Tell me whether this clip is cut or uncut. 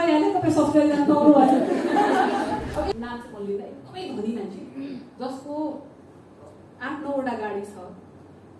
cut